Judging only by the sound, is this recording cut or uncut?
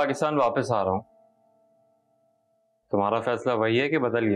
uncut